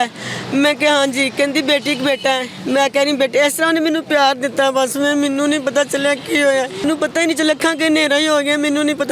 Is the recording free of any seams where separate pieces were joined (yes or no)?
no